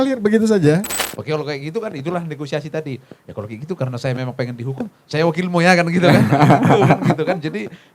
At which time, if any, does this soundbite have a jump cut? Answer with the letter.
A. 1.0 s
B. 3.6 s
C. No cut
A